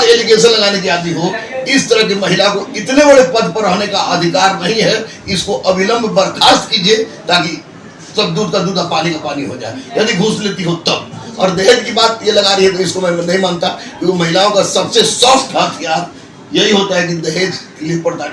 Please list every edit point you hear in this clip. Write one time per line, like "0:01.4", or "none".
none